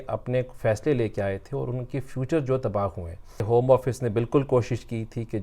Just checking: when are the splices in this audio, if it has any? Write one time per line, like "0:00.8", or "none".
0:03.4